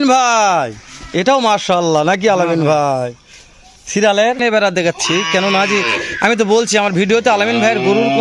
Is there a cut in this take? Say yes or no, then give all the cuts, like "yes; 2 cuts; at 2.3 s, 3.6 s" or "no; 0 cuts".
yes; 1 cut; at 4.4 s